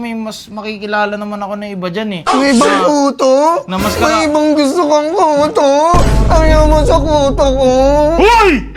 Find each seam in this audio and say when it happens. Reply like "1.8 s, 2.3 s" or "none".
none